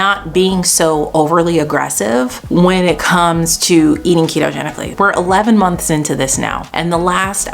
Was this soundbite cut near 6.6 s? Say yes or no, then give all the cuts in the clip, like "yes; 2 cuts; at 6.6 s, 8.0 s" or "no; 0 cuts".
yes; 3 cuts; at 2.4 s, 4.9 s, 6.6 s